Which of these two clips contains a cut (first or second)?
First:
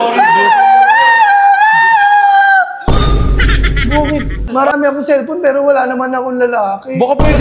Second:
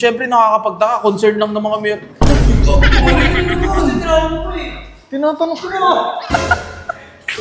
first